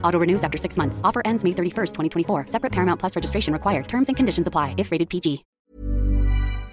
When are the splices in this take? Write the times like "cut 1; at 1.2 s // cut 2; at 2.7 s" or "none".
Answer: cut 1; at 5.6 s